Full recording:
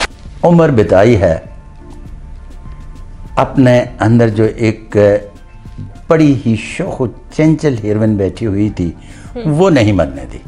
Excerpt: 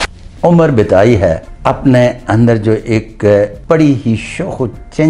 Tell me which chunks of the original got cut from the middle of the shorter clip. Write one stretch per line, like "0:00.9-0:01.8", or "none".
0:01.5-0:03.2
0:05.3-0:06.0